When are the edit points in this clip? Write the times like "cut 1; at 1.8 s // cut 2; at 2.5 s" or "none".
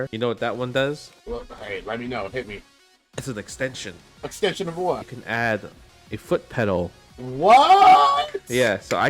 cut 1; at 1.1 s // cut 2; at 4.3 s // cut 3; at 5.1 s // cut 4; at 7.3 s

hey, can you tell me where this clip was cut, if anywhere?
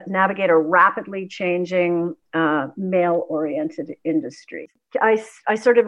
cut 1; at 4.6 s

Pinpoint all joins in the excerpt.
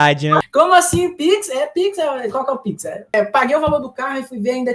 cut 1; at 3.1 s

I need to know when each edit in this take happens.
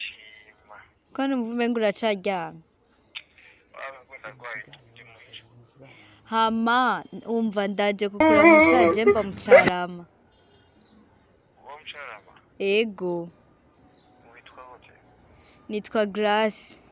none

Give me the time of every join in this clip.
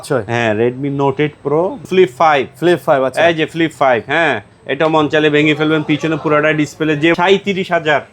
cut 1; at 1.8 s // cut 2; at 7.1 s

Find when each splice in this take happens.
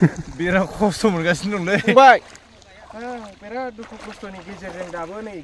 cut 1; at 1.8 s

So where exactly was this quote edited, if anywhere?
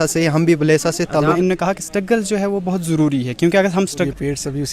cut 1; at 1.4 s // cut 2; at 4.0 s

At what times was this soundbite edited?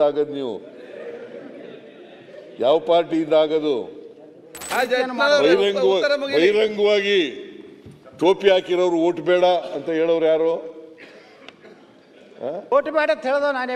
cut 1; at 4.6 s

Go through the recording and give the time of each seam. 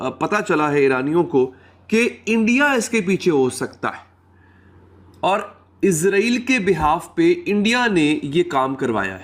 none

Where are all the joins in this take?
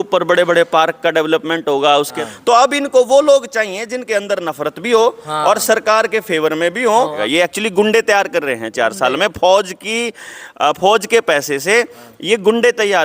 cut 1; at 2.2 s // cut 2; at 7.2 s

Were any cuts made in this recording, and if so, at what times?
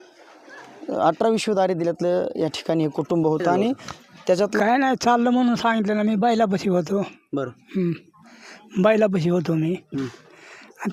cut 1; at 4.6 s

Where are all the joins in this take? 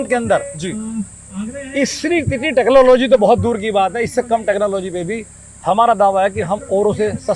none

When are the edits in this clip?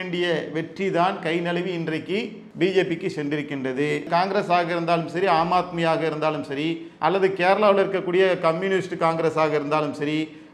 cut 1; at 4.1 s

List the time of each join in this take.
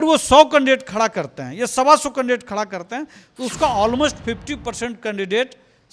none

